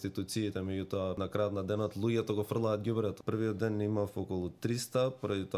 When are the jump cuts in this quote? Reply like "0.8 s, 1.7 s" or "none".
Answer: 1.2 s, 3.2 s